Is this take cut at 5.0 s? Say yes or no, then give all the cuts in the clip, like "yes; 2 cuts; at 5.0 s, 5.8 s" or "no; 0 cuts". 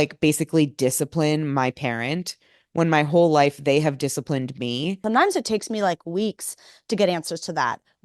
yes; 1 cut; at 5.0 s